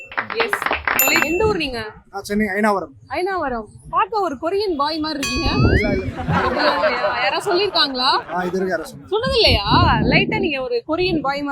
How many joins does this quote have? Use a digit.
1